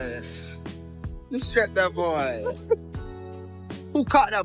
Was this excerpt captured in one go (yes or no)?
yes